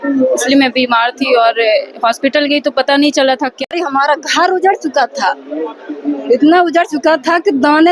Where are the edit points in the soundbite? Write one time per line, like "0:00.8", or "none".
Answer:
0:03.7